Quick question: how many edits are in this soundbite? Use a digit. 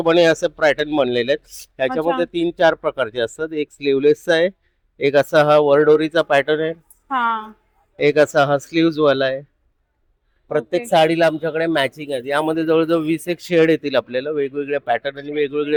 0